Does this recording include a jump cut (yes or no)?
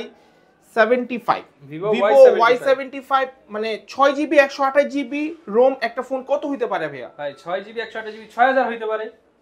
no